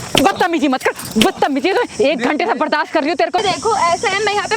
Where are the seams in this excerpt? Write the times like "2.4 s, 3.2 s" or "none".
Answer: 3.4 s